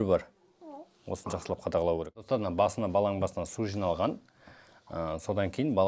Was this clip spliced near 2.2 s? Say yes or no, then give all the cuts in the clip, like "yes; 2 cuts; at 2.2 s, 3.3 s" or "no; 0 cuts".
yes; 1 cut; at 2.2 s